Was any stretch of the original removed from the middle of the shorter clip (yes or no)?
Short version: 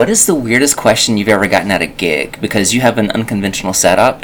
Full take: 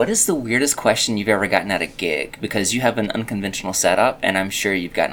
no